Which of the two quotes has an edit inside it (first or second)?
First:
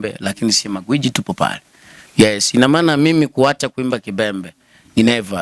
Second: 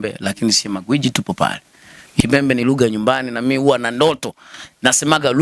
second